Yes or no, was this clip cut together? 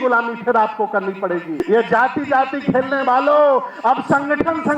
yes